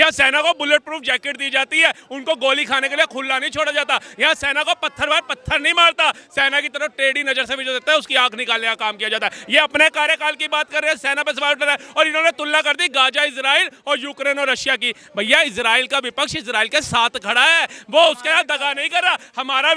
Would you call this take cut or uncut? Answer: uncut